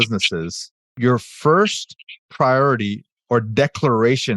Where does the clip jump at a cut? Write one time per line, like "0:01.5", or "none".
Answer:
0:00.9